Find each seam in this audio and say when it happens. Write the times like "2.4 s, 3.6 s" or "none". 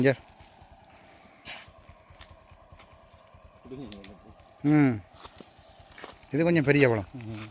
none